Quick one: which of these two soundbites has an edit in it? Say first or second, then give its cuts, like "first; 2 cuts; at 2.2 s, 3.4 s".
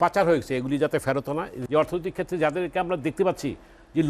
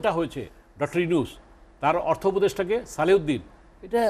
first; 1 cut; at 1.6 s